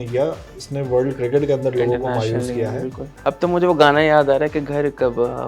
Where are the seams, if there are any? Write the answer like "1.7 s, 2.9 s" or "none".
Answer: 3.2 s